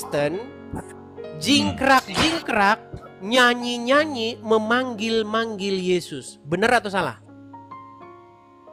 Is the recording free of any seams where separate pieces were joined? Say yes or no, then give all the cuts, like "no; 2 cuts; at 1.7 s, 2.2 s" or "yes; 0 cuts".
yes; 0 cuts